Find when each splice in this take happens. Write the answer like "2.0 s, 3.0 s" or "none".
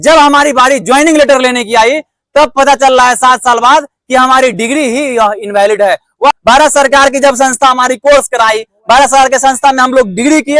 6.3 s